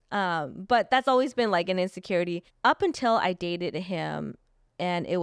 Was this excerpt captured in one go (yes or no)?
yes